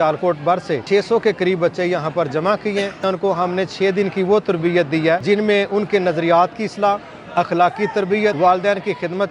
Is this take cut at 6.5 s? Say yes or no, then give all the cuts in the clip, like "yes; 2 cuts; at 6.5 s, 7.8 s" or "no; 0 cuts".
no; 4 cuts; at 0.8 s, 3.0 s, 5.2 s, 8.4 s